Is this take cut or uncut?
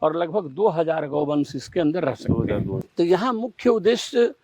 cut